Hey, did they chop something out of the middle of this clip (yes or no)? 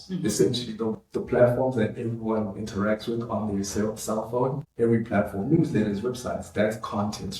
yes